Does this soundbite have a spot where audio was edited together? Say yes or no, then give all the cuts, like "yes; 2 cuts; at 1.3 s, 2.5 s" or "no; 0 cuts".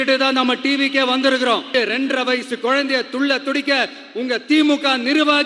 yes; 1 cut; at 1.7 s